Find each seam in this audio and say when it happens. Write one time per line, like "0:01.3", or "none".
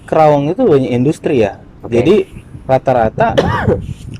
none